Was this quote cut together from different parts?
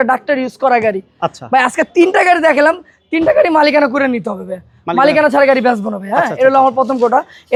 no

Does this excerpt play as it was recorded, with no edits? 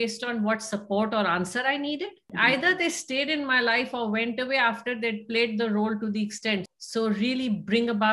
no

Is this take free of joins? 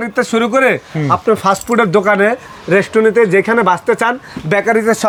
yes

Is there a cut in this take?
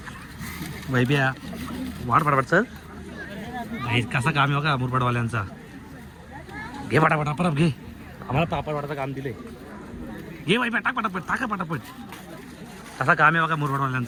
no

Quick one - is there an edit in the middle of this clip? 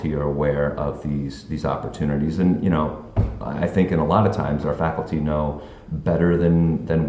no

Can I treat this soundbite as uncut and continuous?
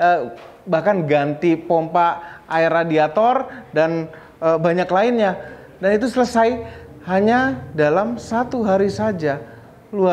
yes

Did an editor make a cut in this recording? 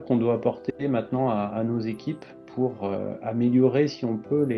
no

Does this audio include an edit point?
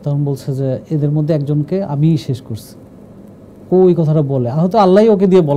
no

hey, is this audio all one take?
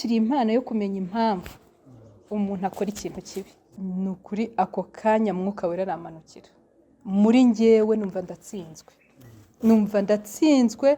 no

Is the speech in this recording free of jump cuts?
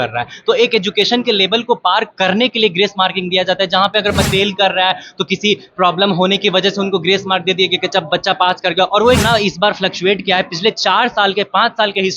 no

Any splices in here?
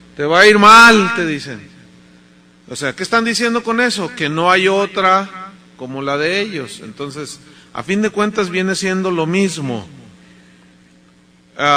no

